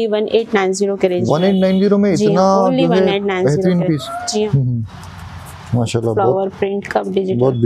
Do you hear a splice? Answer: yes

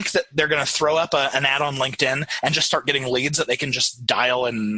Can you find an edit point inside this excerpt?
no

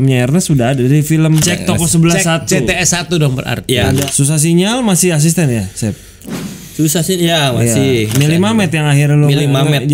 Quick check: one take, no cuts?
no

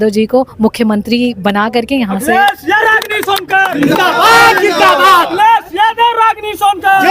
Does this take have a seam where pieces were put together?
yes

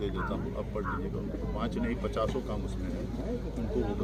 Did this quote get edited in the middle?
no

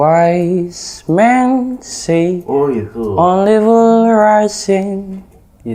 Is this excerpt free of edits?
yes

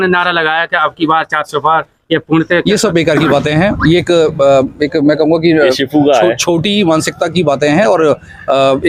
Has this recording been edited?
no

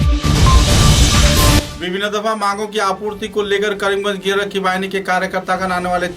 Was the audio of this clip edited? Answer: yes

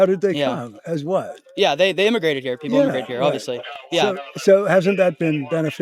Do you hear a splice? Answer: no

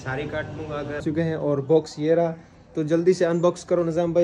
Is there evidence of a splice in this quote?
yes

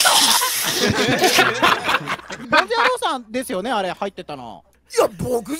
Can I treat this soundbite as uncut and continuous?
no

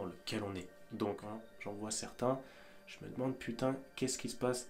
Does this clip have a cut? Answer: yes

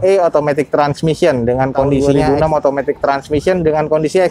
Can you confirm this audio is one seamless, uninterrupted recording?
no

